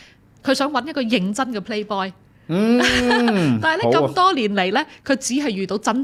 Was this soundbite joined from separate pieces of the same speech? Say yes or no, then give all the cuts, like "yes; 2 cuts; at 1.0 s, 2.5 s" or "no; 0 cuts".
no; 0 cuts